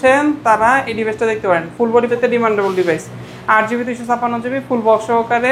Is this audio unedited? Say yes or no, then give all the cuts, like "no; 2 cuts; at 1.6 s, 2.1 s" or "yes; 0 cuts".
no; 1 cut; at 2.1 s